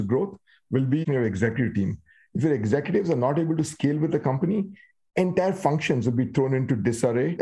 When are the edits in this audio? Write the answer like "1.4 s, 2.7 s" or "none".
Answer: 1.0 s

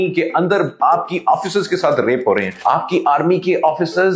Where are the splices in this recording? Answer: 2.5 s

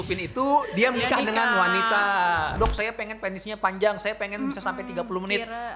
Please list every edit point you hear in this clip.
2.5 s

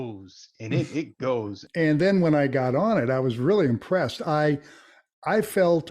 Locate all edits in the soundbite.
1.6 s

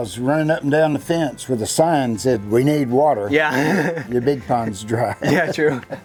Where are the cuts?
none

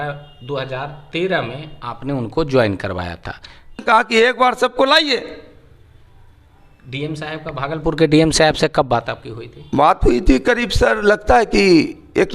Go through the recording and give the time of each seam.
3.8 s

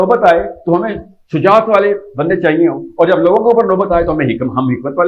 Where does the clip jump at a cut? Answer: none

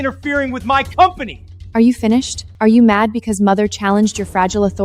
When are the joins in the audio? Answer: 2.4 s

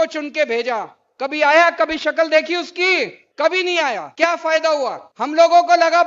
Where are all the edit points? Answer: 3.2 s, 4.1 s, 5.0 s

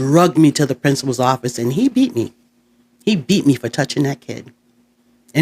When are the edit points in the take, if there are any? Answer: none

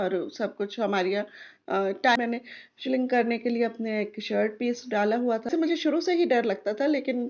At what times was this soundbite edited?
2.2 s, 5.5 s

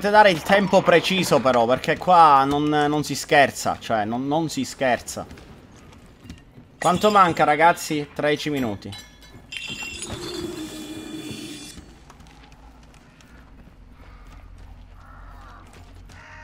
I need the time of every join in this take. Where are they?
none

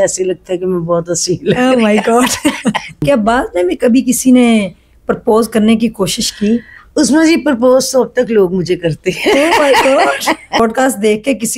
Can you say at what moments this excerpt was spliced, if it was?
3.0 s, 10.6 s

